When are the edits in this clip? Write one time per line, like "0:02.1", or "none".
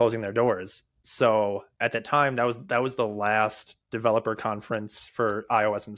none